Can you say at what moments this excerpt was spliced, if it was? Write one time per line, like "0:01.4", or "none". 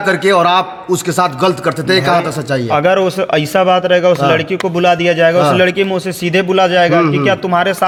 none